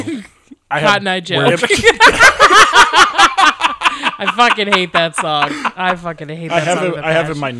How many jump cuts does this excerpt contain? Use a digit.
0